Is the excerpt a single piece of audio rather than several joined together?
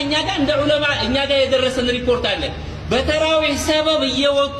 yes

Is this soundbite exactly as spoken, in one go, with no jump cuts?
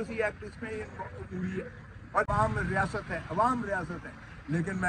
no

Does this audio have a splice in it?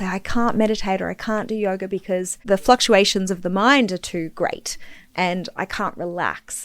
yes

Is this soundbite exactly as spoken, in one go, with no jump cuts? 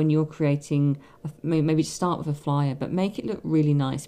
yes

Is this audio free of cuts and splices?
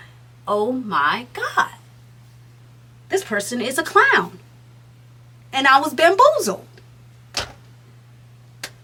yes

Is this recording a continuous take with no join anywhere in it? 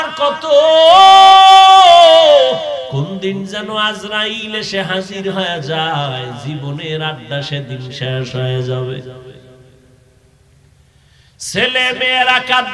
no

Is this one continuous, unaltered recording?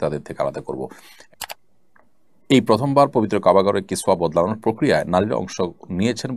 no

